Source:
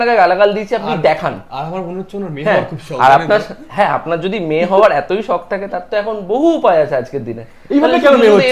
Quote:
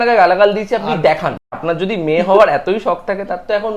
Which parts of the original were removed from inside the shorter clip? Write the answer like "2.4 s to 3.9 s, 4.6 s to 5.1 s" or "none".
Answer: 1.6 s to 4.0 s